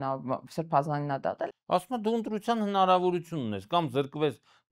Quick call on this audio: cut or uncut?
cut